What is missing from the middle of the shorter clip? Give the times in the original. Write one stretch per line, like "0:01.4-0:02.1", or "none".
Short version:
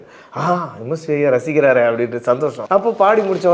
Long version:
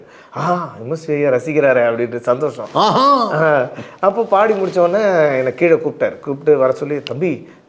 0:02.5-0:03.9